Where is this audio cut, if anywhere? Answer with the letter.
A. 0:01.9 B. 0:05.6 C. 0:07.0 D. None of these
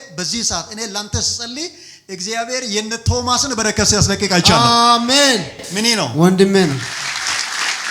C